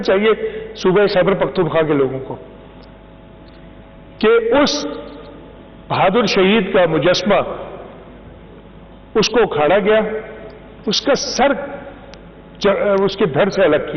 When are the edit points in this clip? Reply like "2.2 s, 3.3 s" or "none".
none